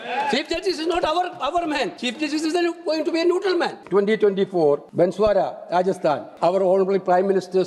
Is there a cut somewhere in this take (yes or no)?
yes